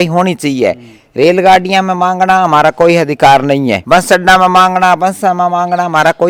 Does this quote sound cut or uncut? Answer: uncut